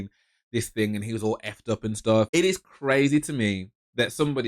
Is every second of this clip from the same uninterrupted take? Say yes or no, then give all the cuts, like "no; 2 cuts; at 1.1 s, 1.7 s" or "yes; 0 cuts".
no; 1 cut; at 2.3 s